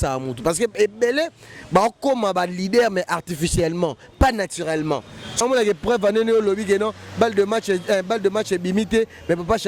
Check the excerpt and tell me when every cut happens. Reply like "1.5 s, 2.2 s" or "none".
5.4 s